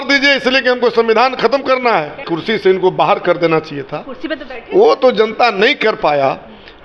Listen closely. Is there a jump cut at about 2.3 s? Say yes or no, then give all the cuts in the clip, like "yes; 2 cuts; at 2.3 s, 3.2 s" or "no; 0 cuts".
yes; 1 cut; at 2.3 s